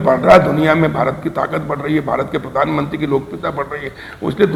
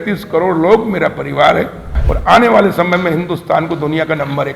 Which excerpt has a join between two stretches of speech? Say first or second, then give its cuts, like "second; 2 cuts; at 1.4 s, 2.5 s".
second; 1 cut; at 2.0 s